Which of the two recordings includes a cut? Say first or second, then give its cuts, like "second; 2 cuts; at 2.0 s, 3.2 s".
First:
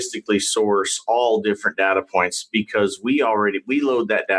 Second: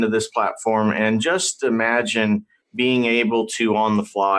second; 1 cut; at 2.6 s